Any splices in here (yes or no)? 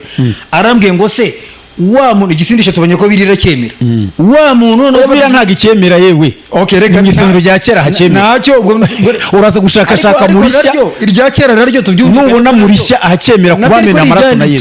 no